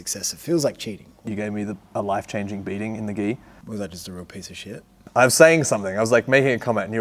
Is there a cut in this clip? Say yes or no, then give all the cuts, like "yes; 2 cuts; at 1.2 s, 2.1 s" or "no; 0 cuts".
yes; 3 cuts; at 1.3 s, 3.5 s, 4.9 s